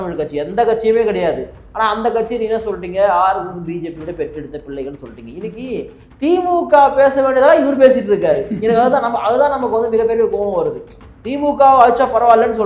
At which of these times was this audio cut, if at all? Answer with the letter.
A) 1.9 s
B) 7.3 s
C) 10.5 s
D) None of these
D